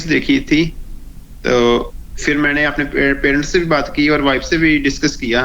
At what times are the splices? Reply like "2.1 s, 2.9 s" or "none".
none